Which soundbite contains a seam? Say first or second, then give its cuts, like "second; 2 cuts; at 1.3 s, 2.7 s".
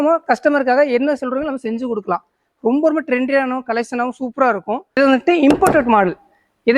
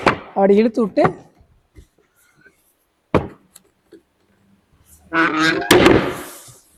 first; 1 cut; at 4.8 s